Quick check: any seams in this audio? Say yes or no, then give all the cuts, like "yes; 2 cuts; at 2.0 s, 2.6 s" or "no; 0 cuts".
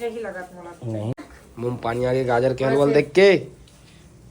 yes; 1 cut; at 1.1 s